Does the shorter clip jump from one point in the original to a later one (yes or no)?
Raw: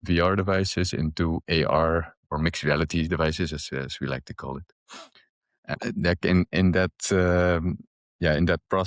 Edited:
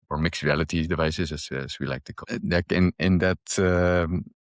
yes